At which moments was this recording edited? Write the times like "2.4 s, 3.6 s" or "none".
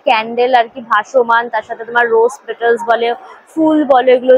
none